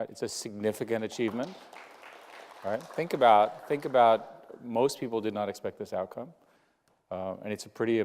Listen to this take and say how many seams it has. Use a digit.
1